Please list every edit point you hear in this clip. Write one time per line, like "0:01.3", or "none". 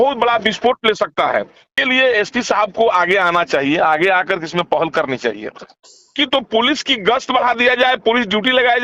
0:01.7
0:06.1